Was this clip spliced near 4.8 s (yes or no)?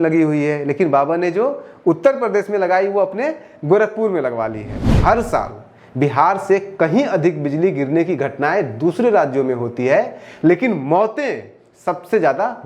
yes